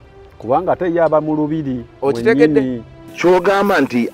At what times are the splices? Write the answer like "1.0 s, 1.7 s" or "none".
3.0 s

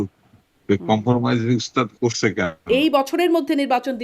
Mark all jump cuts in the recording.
2.7 s

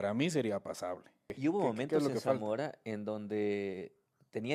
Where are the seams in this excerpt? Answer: 1.3 s

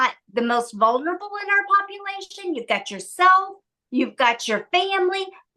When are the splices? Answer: none

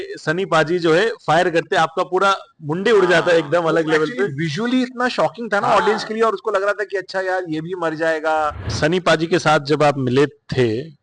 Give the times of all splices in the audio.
8.7 s

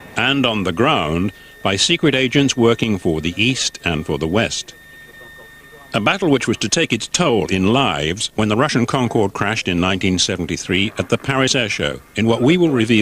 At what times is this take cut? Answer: 9.6 s

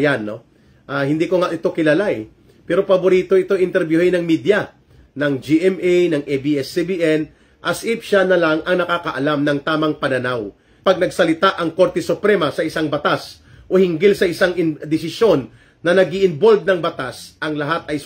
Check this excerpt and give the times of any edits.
10.8 s

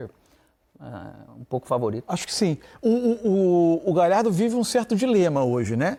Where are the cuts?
none

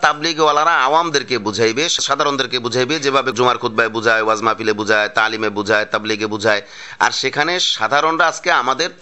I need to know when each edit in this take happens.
2.0 s, 3.3 s

